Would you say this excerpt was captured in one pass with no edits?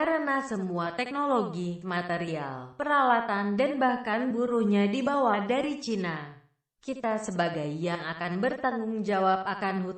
no; 1 cut; at 6.7 s

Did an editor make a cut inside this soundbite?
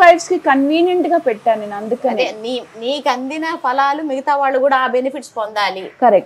no; 0 cuts

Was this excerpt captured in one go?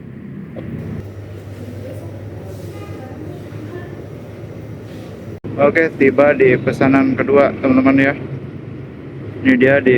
no; 2 cuts; at 1.0 s, 5.5 s

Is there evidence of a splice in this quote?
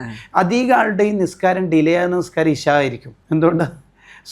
yes; 1 cut; at 3.1 s

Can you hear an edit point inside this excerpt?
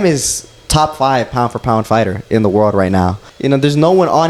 yes; 1 cut; at 3.3 s

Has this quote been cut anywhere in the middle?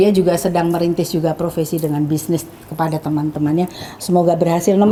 no; 0 cuts

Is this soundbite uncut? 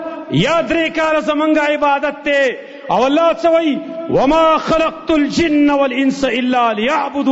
yes; 0 cuts

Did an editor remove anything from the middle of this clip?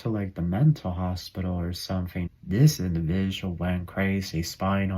yes; 1 cut; at 2.3 s

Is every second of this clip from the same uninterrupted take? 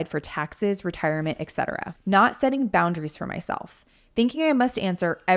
no; 1 cut; at 1.9 s

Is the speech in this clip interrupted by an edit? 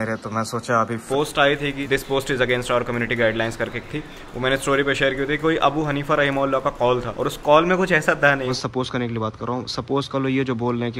yes; 2 cuts; at 1.0 s, 8.5 s

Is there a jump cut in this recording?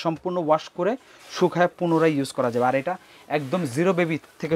no; 0 cuts

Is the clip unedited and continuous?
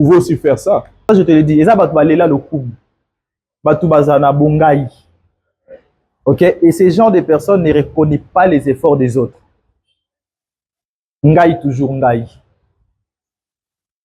no; 1 cut; at 0.9 s

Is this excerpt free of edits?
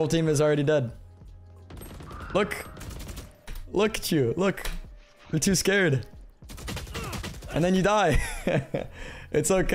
yes; 0 cuts

